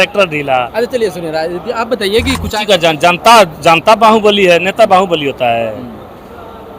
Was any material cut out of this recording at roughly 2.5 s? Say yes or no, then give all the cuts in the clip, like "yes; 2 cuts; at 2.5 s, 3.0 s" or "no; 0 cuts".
yes; 1 cut; at 2.5 s